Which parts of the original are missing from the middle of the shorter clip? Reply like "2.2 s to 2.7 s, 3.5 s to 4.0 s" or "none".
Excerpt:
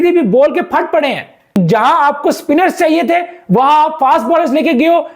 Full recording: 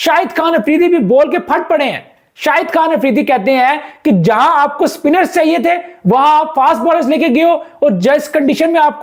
2.3 s to 4.1 s